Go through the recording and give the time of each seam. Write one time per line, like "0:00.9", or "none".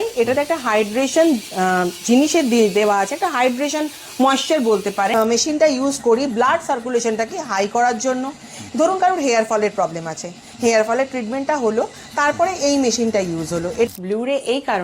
0:05.1
0:13.9